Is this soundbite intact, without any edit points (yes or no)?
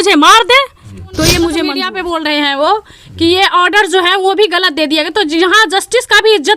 no